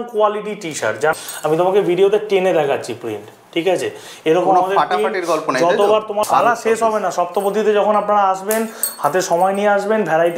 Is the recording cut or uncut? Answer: cut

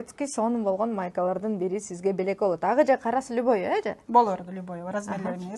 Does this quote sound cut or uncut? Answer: uncut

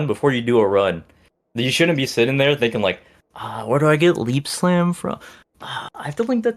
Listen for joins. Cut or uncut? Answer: uncut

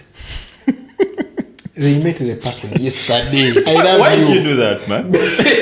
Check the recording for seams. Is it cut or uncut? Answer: cut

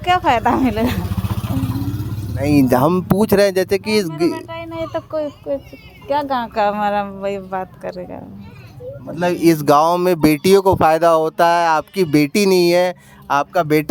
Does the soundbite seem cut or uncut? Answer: uncut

